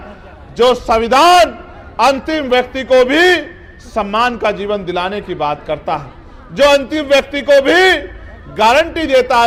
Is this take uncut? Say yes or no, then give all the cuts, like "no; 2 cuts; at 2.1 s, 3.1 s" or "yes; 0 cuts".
yes; 0 cuts